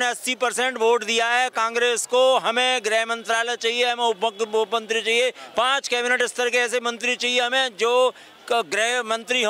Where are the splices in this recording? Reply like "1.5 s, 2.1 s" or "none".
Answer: none